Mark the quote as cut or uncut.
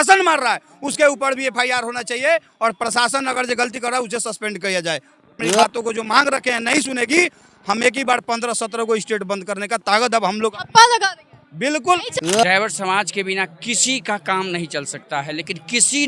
cut